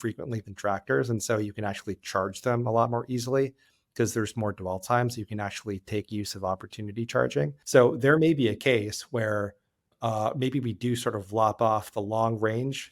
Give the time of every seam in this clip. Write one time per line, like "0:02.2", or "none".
0:07.6
0:09.9